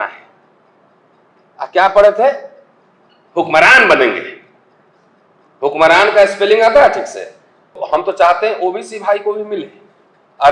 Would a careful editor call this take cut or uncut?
cut